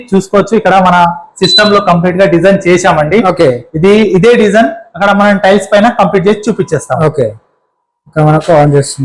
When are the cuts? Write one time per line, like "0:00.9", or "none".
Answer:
none